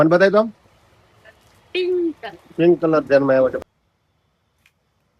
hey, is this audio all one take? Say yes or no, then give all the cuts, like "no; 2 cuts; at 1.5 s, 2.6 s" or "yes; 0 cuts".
no; 1 cut; at 3.6 s